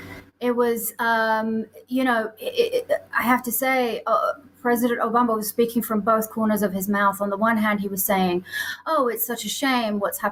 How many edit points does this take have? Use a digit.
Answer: 0